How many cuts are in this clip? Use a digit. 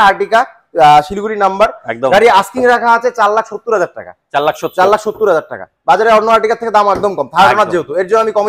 0